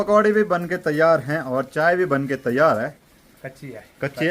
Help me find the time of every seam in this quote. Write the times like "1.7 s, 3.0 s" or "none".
3.0 s